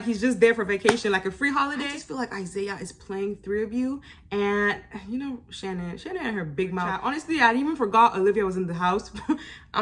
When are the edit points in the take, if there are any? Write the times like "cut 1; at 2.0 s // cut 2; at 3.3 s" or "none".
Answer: cut 1; at 1.9 s // cut 2; at 7.0 s